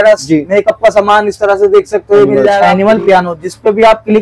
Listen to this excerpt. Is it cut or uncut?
cut